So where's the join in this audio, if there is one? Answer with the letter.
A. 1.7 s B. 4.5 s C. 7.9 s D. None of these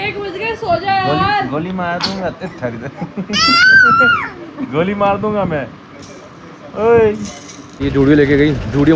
C